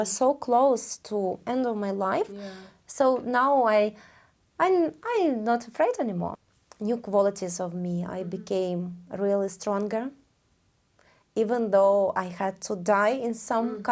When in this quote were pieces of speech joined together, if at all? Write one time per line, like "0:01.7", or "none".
0:06.4